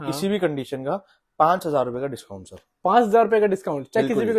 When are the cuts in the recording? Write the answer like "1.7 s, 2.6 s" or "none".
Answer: none